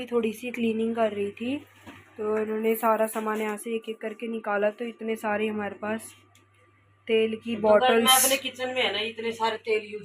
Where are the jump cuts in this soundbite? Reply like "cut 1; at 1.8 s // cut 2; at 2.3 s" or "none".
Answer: none